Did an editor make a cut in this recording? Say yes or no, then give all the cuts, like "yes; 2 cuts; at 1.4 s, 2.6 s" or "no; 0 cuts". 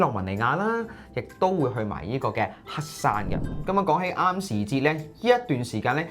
yes; 1 cut; at 3.5 s